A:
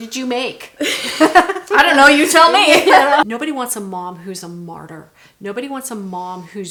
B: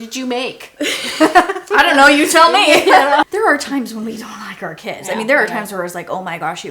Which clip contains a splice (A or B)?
B